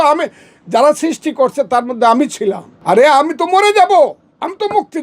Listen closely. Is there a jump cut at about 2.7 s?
yes; 1 cut; at 2.7 s

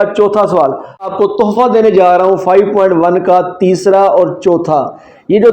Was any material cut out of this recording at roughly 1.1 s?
yes; 1 cut; at 1.1 s

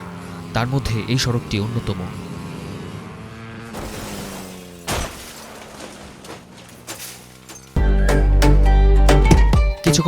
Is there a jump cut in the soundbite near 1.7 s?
no; 1 cut; at 7.8 s

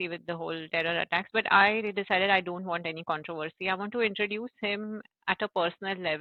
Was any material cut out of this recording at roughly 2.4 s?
no; 0 cuts

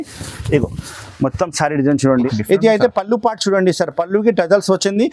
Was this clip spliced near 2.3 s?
yes; 1 cut; at 2.3 s

